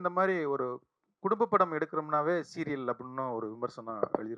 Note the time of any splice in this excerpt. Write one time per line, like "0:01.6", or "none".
none